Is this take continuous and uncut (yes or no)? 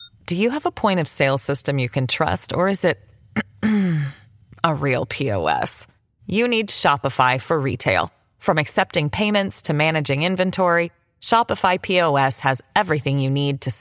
yes